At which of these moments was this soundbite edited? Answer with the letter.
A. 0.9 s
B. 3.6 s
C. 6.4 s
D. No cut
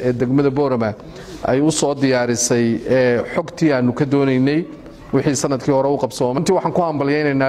C